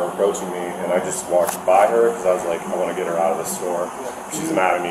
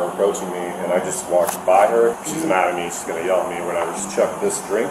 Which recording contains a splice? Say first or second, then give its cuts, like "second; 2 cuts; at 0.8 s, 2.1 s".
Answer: second; 2 cuts; at 2.2 s, 4.0 s